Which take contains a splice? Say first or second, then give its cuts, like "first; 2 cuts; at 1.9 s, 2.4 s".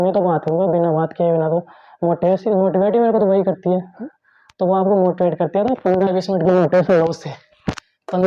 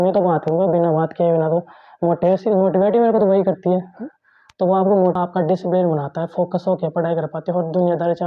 second; 1 cut; at 5.2 s